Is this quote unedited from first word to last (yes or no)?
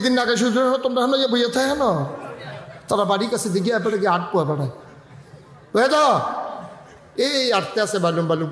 no